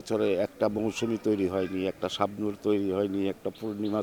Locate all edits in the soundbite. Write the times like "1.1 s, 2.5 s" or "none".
none